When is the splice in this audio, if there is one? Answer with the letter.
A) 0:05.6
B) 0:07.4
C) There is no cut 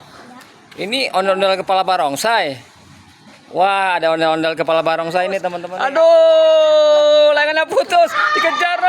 A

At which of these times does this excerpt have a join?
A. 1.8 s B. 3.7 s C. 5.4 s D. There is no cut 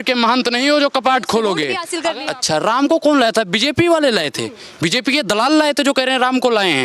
A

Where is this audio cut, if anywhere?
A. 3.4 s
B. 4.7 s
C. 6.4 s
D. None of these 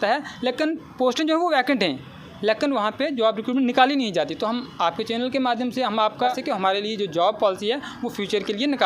C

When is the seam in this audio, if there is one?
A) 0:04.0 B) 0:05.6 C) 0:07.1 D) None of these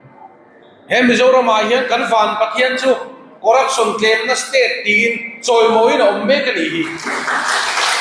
C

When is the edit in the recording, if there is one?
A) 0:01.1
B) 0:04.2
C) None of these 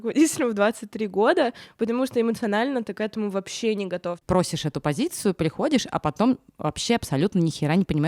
B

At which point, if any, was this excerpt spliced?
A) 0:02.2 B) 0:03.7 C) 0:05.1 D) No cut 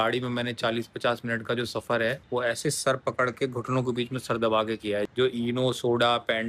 C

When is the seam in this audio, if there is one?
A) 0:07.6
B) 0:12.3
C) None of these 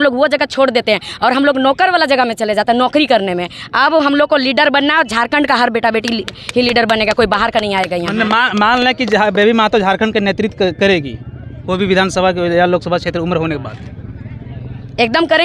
C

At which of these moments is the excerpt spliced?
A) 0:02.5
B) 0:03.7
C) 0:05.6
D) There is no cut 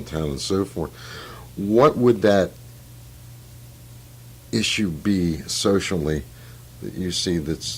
C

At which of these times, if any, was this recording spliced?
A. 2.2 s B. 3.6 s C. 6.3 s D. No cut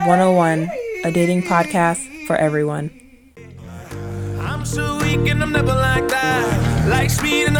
B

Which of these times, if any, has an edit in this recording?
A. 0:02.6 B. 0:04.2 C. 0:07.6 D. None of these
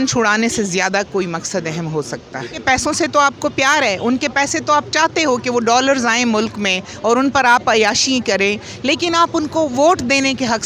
A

